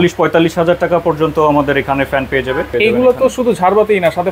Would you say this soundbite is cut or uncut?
cut